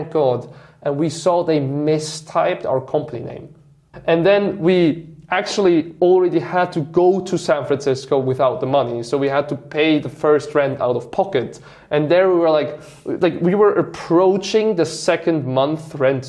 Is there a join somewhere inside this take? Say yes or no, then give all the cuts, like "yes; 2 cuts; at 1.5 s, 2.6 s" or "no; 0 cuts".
yes; 1 cut; at 3.8 s